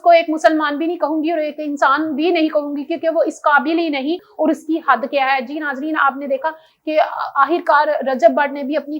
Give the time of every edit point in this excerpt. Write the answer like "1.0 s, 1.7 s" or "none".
4.3 s